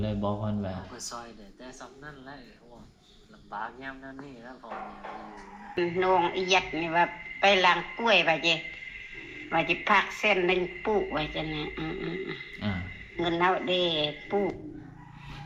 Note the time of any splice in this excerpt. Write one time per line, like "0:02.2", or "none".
0:05.8